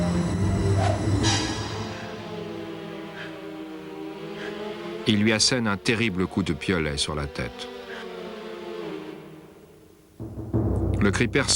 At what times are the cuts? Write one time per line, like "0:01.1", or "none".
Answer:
0:08.4